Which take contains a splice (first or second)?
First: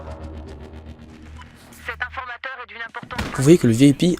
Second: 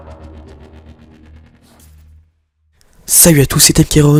first